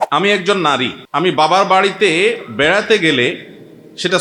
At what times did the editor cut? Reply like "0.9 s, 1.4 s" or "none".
1.0 s